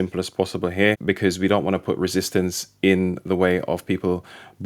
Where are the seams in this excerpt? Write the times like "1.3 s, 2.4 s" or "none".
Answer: 1.0 s